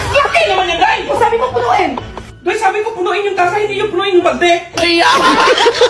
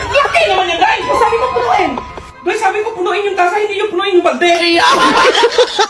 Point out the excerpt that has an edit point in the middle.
second; 1 cut; at 4.6 s

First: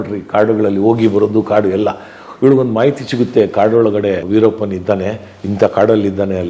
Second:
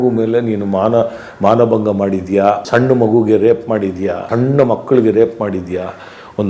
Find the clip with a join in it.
first; 1 cut; at 4.2 s

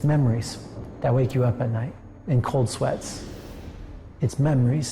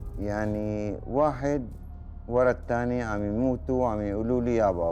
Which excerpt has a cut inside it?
first; 1 cut; at 2.1 s

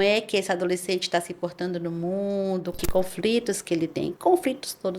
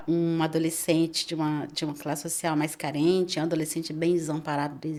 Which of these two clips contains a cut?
first; 2 cuts; at 2.8 s, 4.1 s

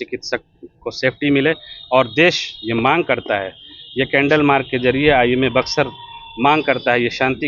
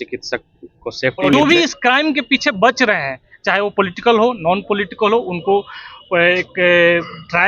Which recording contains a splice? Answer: second; 1 cut; at 1.3 s

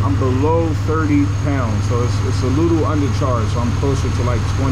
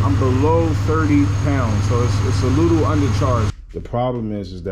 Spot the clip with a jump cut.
second; 1 cut; at 3.5 s

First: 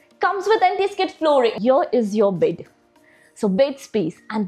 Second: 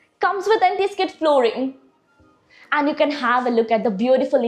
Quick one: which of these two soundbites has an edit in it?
first; 1 cut; at 1.6 s

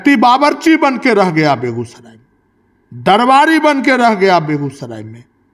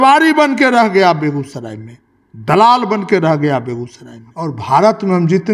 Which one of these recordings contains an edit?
second; 1 cut; at 4.6 s

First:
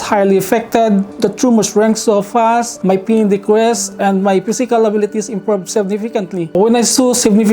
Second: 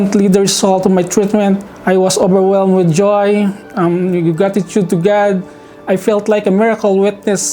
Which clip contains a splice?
first; 1 cut; at 6.5 s

